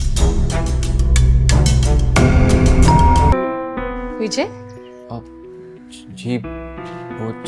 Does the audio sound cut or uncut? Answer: cut